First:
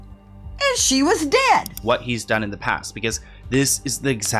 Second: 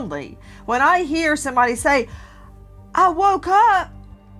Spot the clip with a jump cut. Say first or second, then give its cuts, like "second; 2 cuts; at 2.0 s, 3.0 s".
first; 1 cut; at 1.8 s